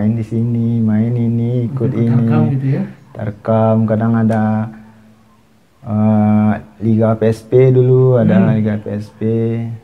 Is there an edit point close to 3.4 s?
no; 0 cuts

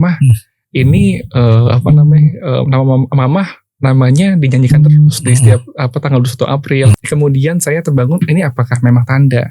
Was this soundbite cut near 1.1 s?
no; 1 cut; at 7.0 s

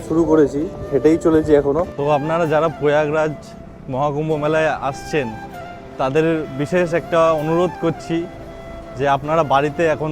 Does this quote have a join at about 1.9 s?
yes; 1 cut; at 1.9 s

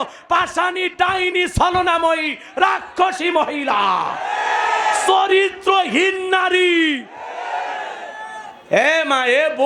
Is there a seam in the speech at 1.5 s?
no; 0 cuts

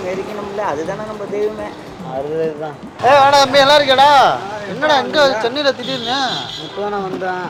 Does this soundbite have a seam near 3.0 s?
no; 0 cuts

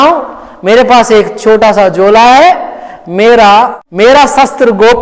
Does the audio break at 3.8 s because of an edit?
yes; 1 cut; at 3.8 s

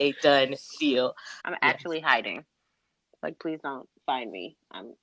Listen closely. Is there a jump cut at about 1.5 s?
yes; 1 cut; at 1.5 s

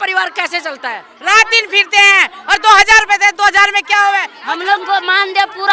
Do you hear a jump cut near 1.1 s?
yes; 2 cuts; at 1.1 s, 4.3 s

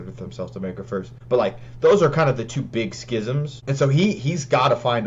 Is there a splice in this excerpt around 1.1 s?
yes; 2 cuts; at 1.1 s, 3.5 s

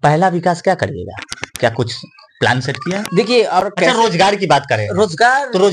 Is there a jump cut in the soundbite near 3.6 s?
yes; 1 cut; at 3.6 s

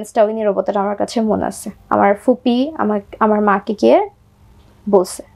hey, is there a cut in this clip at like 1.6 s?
no; 0 cuts

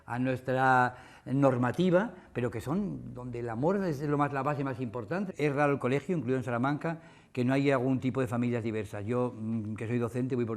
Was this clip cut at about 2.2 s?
no; 1 cut; at 5.3 s

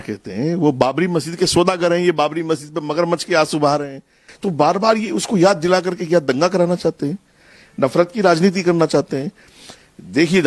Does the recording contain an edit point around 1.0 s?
no; 1 cut; at 4.3 s

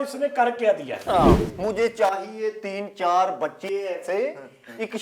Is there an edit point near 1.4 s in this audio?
yes; 1 cut; at 1.4 s

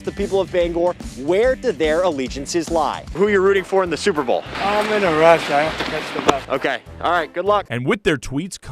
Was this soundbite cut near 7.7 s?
yes; 2 cuts; at 3.2 s, 7.7 s

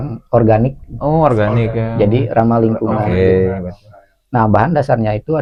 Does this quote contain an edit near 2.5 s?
no; 0 cuts

